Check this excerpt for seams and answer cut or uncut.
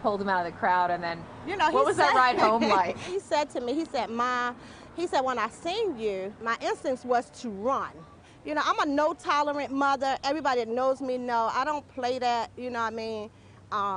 uncut